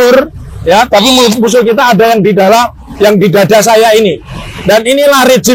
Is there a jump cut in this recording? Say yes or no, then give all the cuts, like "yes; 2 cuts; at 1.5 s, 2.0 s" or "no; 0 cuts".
no; 0 cuts